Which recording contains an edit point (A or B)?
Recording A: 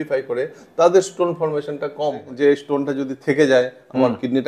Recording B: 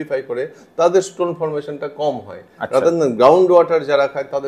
A